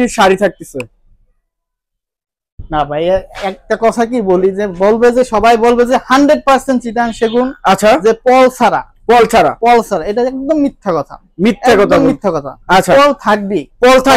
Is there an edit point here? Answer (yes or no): no